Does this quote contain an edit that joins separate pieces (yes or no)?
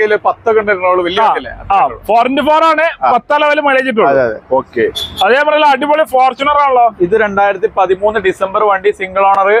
no